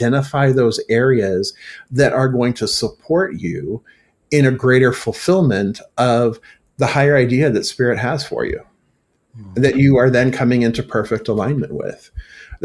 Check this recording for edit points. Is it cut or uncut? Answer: uncut